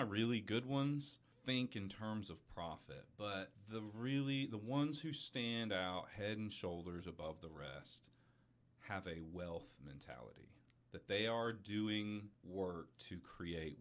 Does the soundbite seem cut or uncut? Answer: uncut